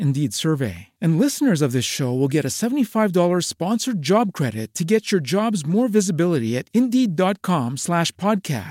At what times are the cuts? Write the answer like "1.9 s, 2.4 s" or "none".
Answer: none